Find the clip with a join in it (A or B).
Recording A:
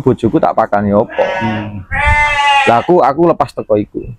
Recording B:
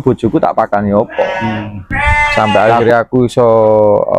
B